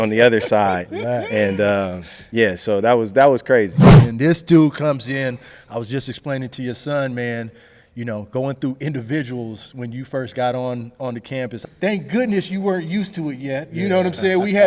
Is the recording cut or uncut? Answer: cut